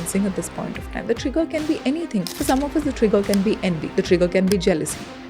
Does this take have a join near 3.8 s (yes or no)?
yes